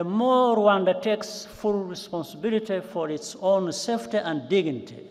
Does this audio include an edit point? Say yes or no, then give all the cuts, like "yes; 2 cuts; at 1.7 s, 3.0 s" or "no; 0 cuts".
no; 0 cuts